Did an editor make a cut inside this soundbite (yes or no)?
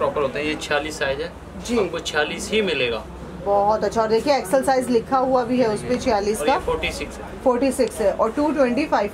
no